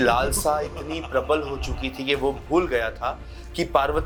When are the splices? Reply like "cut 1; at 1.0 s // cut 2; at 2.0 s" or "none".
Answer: none